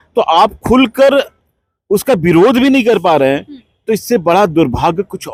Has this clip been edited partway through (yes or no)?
no